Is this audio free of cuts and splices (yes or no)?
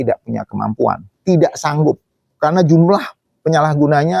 yes